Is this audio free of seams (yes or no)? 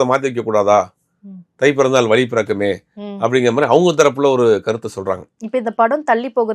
yes